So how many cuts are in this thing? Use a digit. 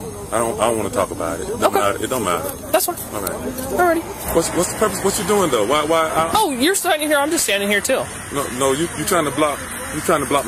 1